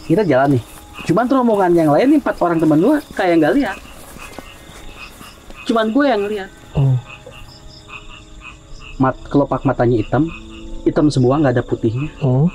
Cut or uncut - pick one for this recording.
uncut